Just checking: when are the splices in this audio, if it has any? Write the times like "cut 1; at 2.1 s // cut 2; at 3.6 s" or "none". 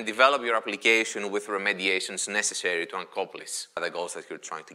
cut 1; at 3.8 s